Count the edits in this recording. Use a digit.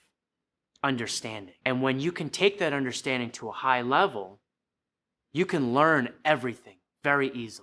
1